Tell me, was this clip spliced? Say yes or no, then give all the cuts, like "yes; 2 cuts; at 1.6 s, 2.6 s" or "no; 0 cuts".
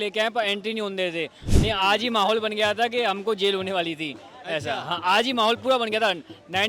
yes; 1 cut; at 1.5 s